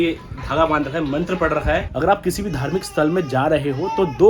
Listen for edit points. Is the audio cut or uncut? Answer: cut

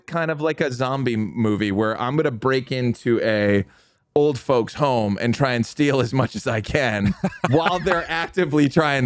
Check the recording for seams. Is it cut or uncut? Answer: uncut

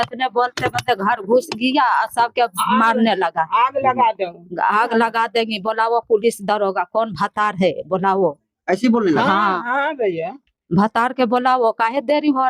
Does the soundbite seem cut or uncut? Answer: uncut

